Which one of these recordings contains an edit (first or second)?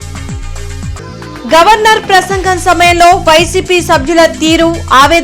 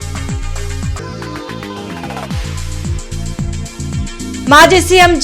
second